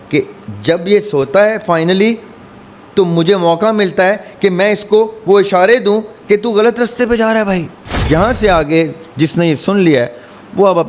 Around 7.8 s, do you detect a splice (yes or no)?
yes